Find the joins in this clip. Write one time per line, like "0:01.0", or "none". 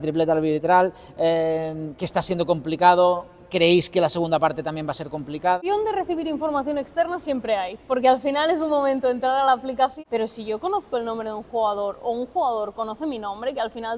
0:05.6
0:10.0